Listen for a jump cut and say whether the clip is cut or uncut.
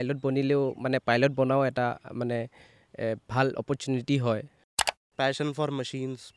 cut